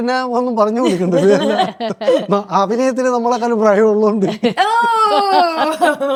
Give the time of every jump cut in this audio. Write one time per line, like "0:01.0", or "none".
none